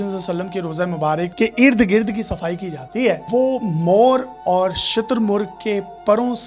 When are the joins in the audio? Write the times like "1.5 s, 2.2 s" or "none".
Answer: 1.3 s, 3.2 s